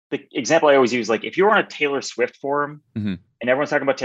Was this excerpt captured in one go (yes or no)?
yes